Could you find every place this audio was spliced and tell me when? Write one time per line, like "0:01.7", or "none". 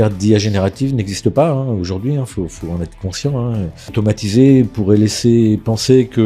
0:03.9